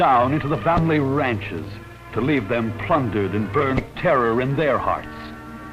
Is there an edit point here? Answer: no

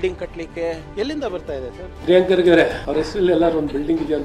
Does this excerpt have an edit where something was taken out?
yes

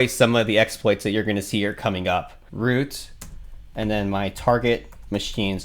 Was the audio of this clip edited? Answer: yes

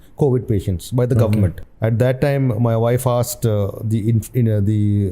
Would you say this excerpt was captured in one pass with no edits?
no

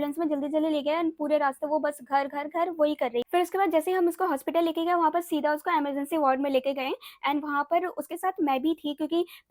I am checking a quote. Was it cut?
no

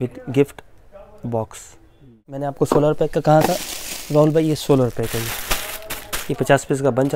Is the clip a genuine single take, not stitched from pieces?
no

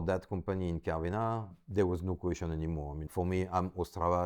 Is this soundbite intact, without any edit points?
no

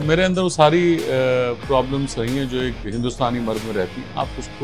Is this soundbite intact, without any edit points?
yes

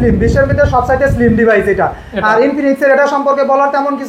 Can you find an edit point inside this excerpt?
no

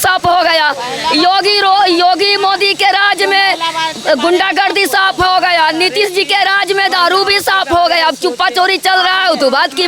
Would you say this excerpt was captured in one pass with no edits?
yes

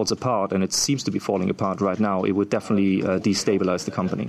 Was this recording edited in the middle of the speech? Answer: no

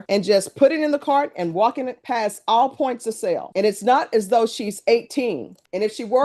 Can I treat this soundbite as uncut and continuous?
yes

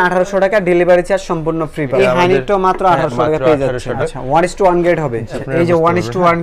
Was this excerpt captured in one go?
no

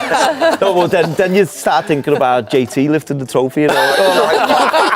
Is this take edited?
no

